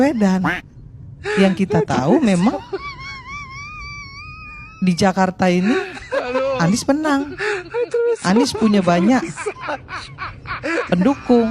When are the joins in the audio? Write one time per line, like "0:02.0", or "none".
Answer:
none

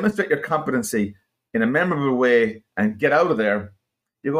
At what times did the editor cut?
none

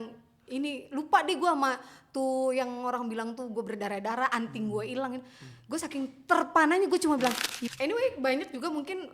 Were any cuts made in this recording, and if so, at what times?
0:07.5

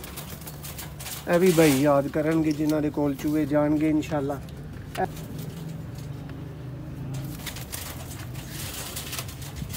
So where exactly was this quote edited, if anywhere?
0:05.0

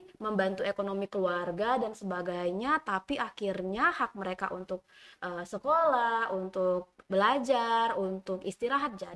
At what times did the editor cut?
none

